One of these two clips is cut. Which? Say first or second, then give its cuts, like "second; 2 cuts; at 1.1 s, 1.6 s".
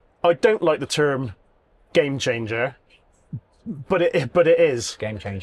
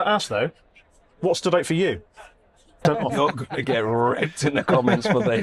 second; 1 cut; at 2.8 s